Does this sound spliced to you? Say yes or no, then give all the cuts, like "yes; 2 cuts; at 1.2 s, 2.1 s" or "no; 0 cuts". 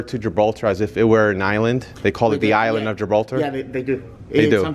no; 0 cuts